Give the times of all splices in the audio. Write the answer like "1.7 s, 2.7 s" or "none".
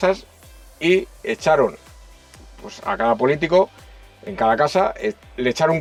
none